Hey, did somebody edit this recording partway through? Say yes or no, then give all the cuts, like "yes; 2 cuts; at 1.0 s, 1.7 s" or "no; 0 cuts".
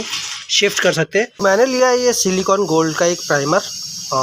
yes; 1 cut; at 1.6 s